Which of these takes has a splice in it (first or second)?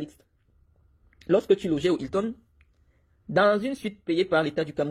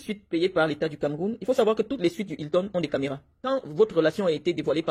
second